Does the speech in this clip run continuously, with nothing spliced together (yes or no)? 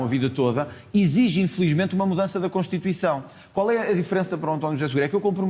yes